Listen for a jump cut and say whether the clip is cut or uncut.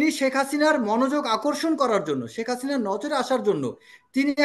uncut